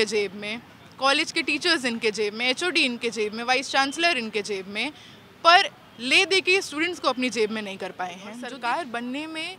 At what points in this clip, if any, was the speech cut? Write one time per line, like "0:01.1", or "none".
0:08.4